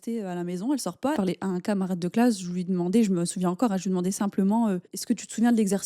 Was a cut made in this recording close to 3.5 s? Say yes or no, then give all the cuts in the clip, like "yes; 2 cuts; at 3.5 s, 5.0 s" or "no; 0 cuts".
no; 2 cuts; at 1.2 s, 4.9 s